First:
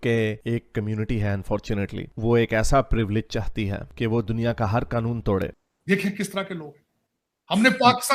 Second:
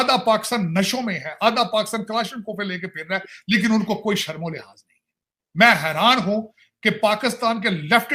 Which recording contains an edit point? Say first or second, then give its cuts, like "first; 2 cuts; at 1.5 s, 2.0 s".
first; 1 cut; at 5.6 s